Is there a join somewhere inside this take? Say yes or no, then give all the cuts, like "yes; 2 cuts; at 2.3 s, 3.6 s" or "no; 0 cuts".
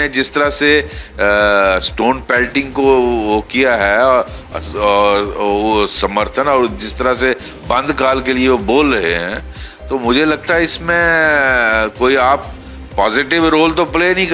no; 0 cuts